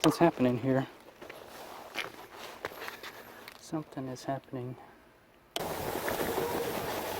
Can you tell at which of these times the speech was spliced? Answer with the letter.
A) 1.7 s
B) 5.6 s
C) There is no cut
B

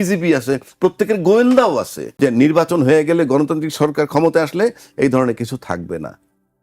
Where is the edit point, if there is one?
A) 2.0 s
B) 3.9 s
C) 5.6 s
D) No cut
A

